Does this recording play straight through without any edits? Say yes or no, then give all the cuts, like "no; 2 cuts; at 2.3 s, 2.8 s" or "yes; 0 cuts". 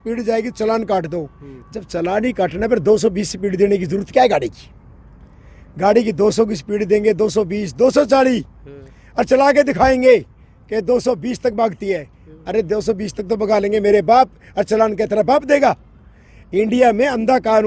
yes; 0 cuts